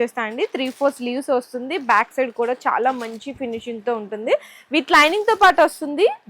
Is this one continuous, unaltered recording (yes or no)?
yes